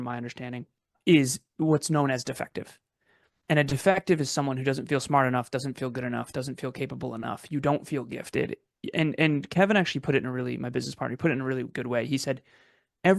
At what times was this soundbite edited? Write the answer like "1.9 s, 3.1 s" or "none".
1.0 s